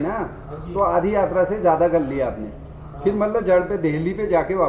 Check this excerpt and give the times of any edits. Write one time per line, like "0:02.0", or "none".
none